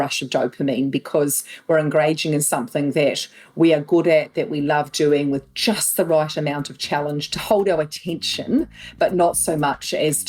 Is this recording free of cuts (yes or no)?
yes